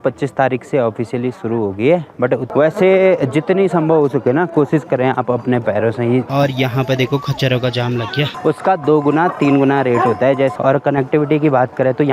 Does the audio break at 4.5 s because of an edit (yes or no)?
no